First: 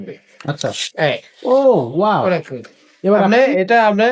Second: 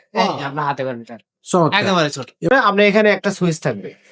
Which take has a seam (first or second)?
second